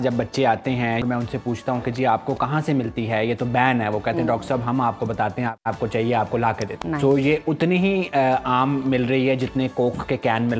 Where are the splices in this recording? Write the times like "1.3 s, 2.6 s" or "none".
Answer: 1.0 s, 5.6 s, 6.7 s